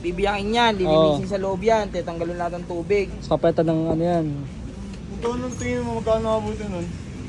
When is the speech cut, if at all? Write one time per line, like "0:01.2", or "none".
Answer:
none